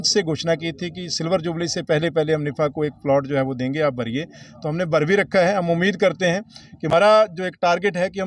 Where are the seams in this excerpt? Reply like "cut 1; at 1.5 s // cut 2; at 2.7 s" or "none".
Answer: cut 1; at 6.9 s